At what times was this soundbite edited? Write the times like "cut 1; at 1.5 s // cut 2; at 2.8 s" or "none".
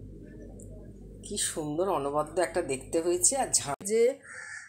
cut 1; at 3.7 s